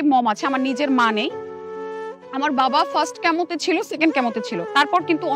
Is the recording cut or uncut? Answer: uncut